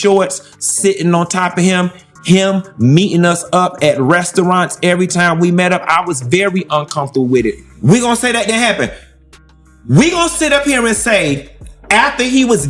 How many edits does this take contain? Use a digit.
1